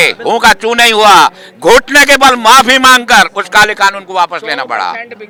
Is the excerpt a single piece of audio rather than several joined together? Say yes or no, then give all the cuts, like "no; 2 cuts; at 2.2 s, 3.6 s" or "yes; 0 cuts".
yes; 0 cuts